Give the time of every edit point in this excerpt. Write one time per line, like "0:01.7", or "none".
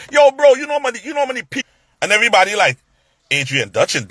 0:01.5

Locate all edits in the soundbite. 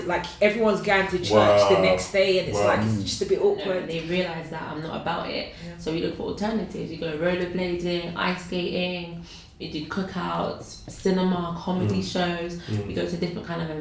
0:03.9

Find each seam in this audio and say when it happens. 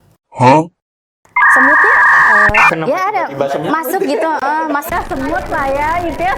none

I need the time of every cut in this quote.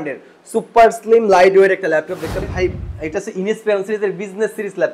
0:02.4

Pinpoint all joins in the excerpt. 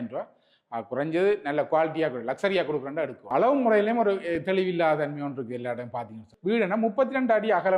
0:03.3
0:06.3

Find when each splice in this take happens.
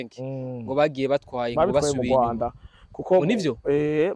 none

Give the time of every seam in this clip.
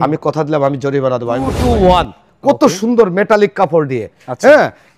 0:01.6

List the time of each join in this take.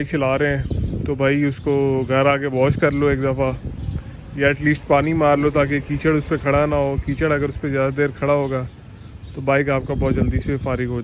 none

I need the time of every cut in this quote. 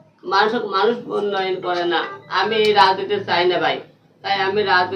none

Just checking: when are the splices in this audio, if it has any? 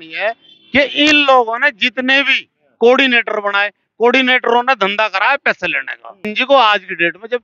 0:06.4

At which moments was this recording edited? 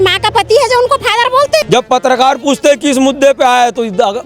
0:01.6

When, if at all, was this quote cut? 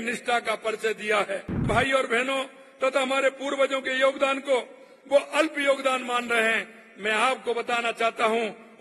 0:01.6

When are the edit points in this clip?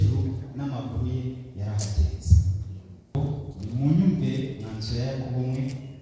0:03.1

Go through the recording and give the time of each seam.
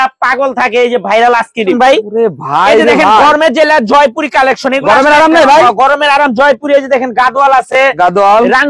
0:01.8

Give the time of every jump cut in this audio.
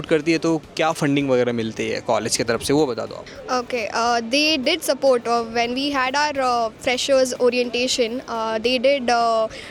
none

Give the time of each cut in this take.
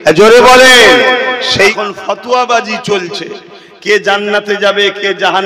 0:01.8

